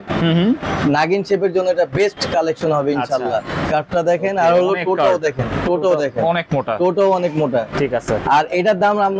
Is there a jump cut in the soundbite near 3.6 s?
yes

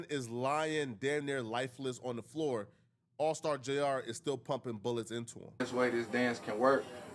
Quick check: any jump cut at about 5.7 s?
yes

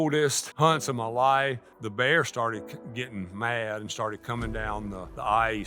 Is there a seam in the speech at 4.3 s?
no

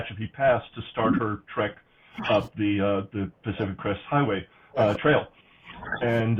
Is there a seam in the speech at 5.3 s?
no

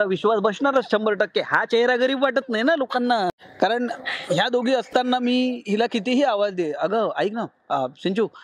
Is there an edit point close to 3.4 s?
yes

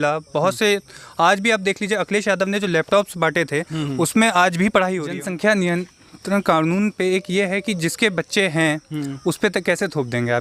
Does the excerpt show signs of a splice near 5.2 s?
yes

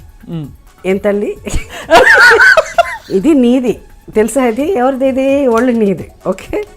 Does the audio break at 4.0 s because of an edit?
no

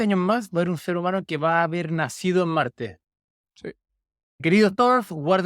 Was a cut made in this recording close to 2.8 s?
no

